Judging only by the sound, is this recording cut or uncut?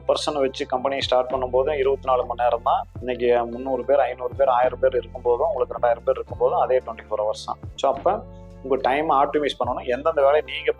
uncut